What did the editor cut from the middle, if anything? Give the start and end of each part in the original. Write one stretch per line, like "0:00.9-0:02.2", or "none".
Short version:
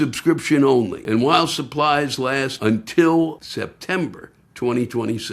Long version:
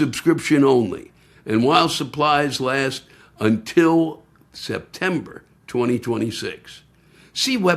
0:01.0-0:01.4
0:02.9-0:03.3
0:04.2-0:04.6